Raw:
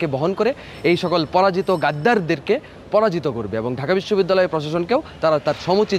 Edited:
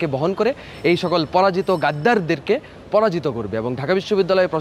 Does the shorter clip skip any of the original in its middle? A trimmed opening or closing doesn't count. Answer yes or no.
no